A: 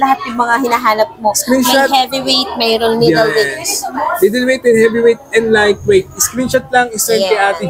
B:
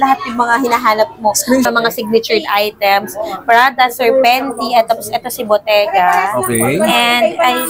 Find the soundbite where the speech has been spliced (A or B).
B